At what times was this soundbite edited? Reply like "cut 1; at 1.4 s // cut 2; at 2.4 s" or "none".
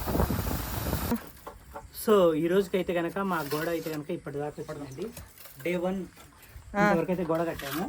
cut 1; at 1.1 s